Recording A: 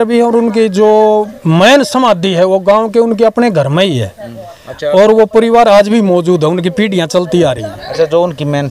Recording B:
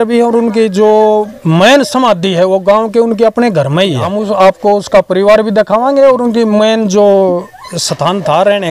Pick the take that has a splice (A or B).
B